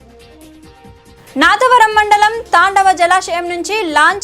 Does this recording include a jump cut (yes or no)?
yes